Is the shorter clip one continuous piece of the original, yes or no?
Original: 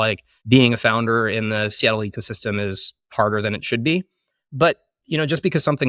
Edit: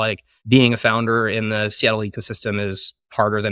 yes